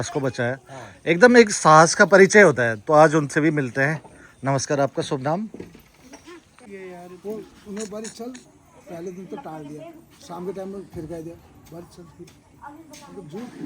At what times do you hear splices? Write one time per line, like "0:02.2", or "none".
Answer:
0:06.7